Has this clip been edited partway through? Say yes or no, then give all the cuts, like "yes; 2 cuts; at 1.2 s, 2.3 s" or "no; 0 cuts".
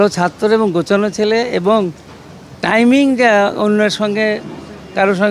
no; 0 cuts